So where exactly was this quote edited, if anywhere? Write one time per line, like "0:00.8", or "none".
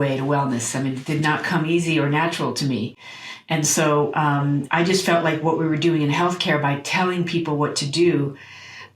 none

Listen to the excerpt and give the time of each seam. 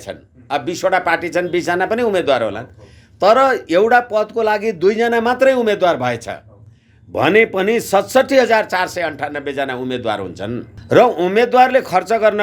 0:10.7

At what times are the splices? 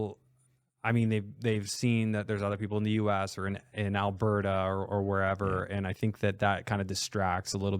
none

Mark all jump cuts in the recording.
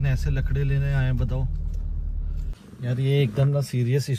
0:02.5

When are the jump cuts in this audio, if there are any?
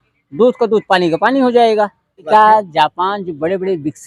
0:02.3

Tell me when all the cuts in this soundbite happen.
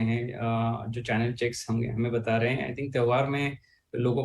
0:02.7

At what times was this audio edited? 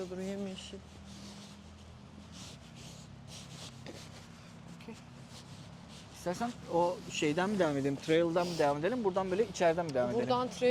none

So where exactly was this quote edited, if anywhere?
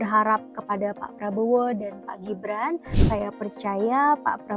0:02.9

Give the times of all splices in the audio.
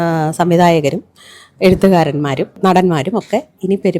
0:02.5

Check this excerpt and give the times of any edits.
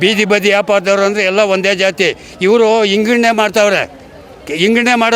none

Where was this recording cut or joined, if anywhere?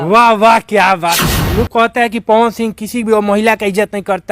0:01.2

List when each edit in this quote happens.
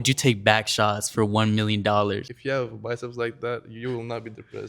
0:02.3

